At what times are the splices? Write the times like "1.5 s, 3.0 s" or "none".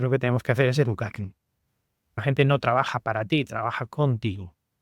2.2 s